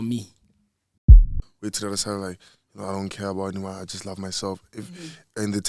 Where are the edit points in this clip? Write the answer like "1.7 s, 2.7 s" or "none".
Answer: 1.3 s